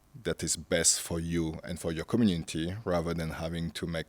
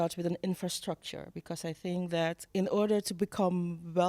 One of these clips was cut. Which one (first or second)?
second